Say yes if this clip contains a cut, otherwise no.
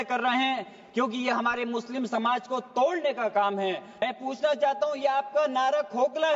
yes